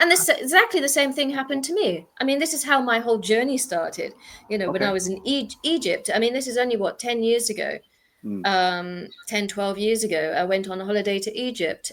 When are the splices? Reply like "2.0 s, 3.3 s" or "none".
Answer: none